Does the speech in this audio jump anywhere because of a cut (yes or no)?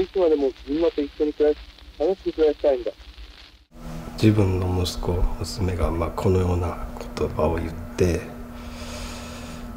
yes